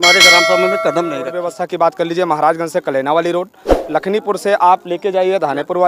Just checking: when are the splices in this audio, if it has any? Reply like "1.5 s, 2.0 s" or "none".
1.5 s